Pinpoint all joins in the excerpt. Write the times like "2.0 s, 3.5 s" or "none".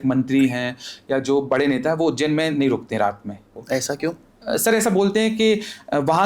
3.5 s